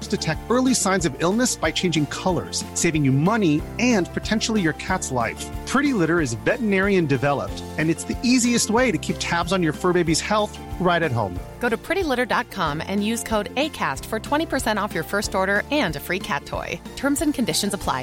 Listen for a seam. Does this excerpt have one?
no; 0 cuts

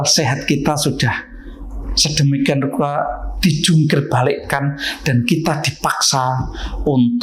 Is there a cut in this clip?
no; 0 cuts

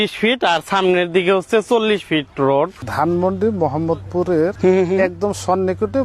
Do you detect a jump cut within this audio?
yes; 2 cuts; at 2.8 s, 4.5 s

